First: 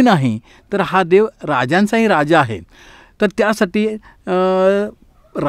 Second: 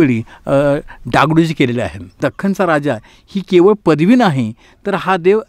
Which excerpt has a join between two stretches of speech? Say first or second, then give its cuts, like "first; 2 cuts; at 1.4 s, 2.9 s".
second; 1 cut; at 2.2 s